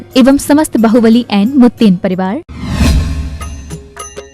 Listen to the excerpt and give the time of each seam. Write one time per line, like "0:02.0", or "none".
0:02.5